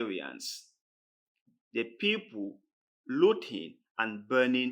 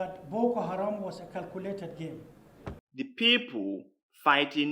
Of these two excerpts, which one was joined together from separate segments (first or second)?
second